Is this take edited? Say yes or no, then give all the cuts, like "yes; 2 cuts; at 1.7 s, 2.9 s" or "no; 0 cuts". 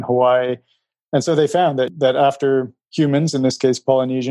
yes; 1 cut; at 1.9 s